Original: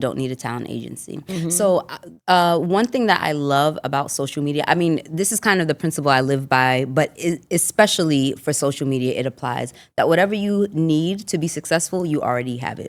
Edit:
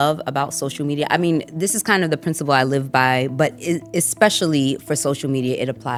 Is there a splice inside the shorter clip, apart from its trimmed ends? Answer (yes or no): no